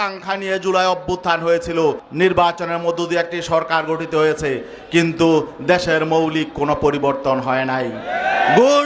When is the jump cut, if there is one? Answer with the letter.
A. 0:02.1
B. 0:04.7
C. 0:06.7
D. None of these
A